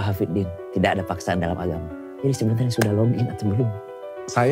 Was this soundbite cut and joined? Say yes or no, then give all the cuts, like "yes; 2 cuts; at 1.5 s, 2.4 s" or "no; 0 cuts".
no; 0 cuts